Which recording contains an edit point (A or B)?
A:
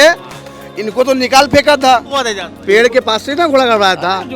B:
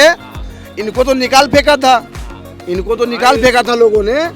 A